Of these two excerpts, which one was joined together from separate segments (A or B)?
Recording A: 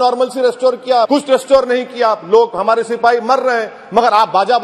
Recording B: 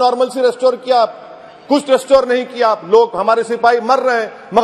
A